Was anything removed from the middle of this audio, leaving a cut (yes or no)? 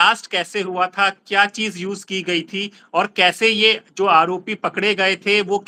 no